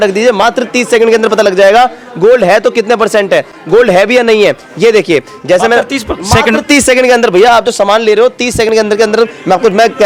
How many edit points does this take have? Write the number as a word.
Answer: zero